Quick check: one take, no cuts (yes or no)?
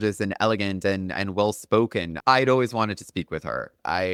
yes